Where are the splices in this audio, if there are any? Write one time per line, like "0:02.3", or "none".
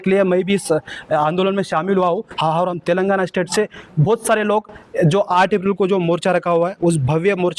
none